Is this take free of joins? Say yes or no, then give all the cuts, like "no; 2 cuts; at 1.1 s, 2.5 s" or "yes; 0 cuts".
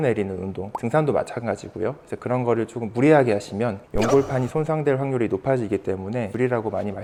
yes; 0 cuts